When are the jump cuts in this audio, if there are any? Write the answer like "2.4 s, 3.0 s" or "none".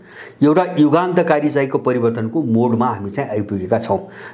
none